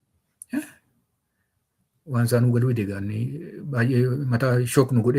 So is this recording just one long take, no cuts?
yes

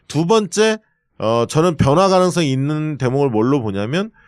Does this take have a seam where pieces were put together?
yes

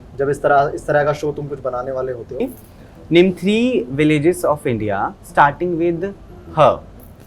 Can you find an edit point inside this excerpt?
yes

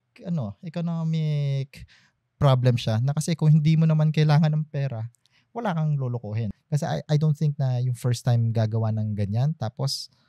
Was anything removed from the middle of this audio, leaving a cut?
yes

